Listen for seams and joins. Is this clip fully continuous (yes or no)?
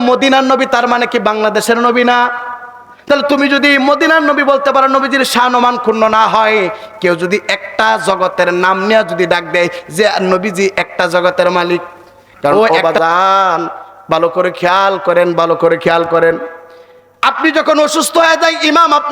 no